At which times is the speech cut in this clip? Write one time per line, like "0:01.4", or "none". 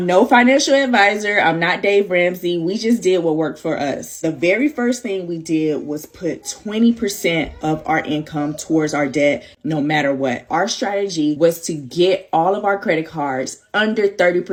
none